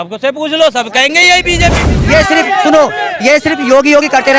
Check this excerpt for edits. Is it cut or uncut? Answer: cut